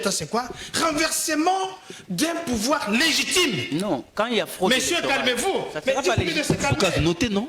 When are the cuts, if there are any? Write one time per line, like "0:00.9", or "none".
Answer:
none